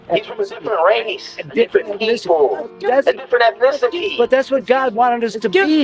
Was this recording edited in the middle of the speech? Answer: no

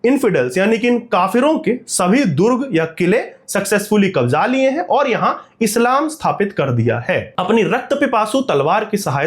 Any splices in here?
no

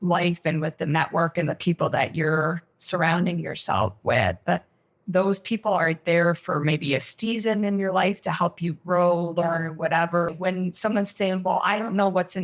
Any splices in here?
yes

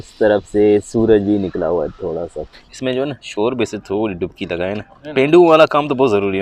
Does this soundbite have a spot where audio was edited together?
yes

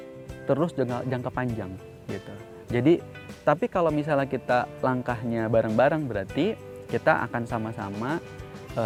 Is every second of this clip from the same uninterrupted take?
yes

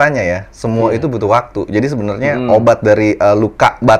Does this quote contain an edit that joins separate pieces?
no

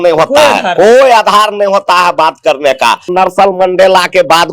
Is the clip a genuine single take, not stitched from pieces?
no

